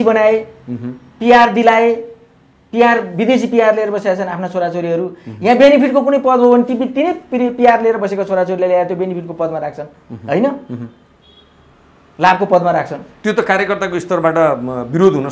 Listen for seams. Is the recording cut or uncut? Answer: uncut